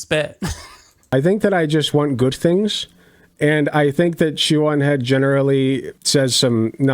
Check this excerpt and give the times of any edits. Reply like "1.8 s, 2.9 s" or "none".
1.1 s